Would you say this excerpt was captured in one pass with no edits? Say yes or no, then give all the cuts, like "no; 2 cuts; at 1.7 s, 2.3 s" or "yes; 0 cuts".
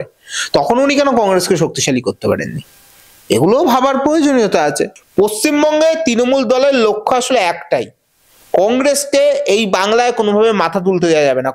no; 1 cut; at 5.0 s